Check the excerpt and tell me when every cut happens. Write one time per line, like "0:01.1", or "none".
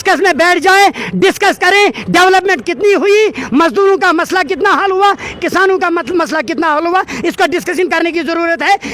none